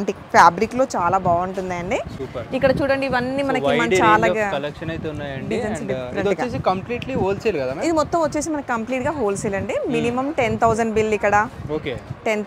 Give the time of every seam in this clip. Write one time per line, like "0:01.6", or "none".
none